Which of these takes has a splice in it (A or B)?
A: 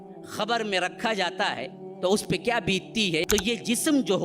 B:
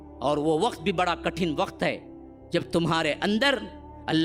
A